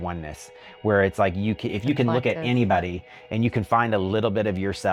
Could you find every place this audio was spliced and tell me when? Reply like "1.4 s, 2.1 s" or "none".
none